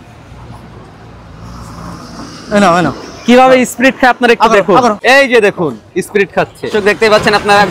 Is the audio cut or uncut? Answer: cut